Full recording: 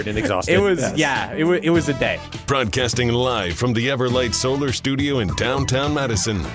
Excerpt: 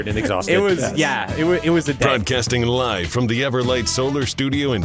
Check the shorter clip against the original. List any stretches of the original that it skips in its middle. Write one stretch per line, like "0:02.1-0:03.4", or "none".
0:02.0-0:02.5